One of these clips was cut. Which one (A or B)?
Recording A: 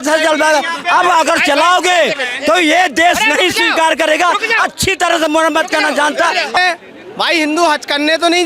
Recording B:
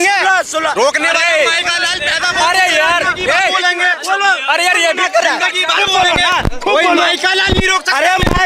A